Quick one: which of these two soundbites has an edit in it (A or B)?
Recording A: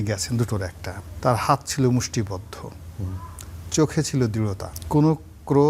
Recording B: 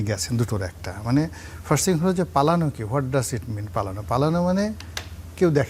A